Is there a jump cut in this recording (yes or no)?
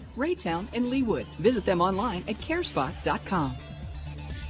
yes